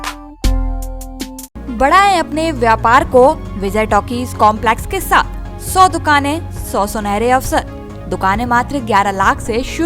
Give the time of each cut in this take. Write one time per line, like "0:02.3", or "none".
none